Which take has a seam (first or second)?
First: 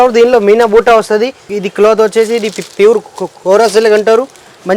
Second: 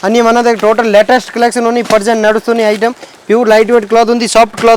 first